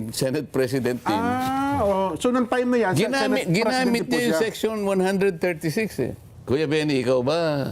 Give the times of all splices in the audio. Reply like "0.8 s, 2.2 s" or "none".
6.3 s